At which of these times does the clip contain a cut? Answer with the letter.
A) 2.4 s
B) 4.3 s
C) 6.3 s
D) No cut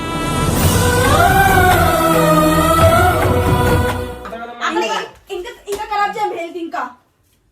B